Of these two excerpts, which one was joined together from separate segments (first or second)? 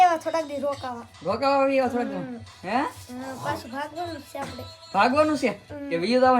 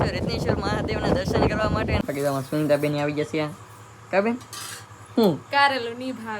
second